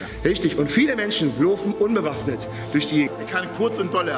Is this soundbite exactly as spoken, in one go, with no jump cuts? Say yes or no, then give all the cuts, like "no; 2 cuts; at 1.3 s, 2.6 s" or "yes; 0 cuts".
no; 1 cut; at 3.1 s